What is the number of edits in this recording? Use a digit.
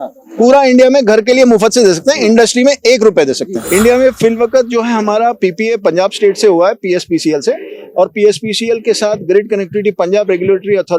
1